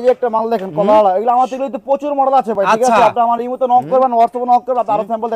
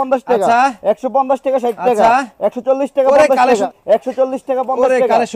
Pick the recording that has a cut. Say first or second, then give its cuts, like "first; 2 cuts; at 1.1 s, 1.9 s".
second; 1 cut; at 3.6 s